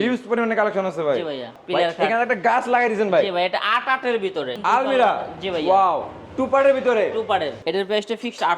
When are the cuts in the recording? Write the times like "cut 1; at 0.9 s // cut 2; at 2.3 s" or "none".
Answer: cut 1; at 1.5 s // cut 2; at 4.5 s // cut 3; at 7.6 s